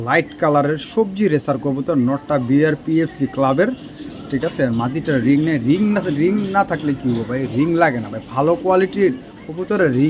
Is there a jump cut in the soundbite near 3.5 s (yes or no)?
no